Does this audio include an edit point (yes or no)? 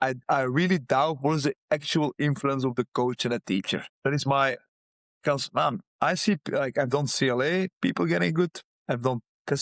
no